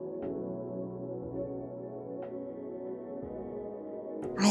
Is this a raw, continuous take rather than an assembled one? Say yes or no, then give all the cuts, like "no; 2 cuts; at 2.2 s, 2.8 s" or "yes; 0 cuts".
yes; 0 cuts